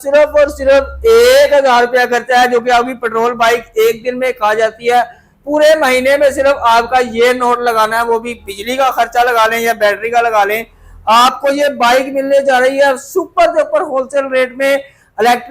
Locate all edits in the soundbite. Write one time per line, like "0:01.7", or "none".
none